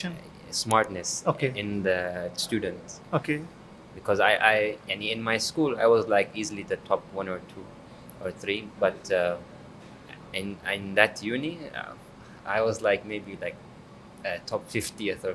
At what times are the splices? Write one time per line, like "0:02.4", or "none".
none